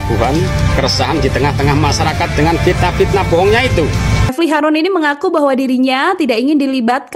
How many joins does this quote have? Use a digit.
1